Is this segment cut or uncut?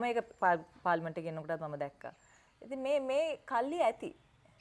uncut